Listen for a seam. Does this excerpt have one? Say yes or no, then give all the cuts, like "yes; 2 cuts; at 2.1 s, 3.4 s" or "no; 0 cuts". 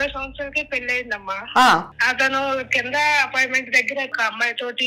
yes; 2 cuts; at 1.9 s, 4.1 s